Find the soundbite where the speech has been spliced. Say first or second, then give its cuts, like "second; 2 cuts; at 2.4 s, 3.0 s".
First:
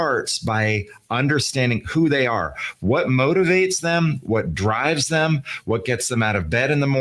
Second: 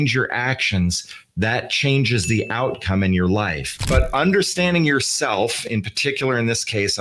second; 1 cut; at 3.8 s